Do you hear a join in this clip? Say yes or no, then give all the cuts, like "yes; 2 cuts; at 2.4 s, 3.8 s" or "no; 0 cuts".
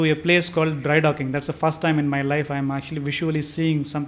no; 0 cuts